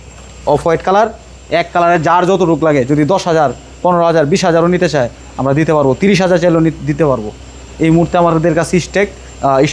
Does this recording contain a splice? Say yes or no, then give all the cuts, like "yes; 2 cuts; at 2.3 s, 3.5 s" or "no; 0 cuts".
no; 0 cuts